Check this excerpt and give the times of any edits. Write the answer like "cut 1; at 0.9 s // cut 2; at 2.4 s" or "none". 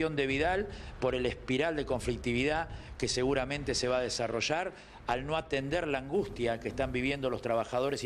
none